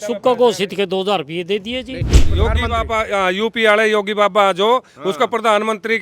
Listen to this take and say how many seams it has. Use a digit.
1